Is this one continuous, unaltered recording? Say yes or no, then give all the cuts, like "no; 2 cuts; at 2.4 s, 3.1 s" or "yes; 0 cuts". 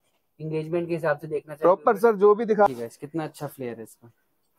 no; 1 cut; at 2.7 s